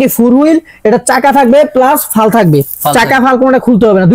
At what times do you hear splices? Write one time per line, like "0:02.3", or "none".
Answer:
none